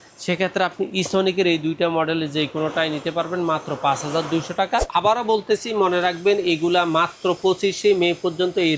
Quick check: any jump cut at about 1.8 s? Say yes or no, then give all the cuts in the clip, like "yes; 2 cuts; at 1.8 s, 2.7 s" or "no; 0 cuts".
no; 1 cut; at 4.9 s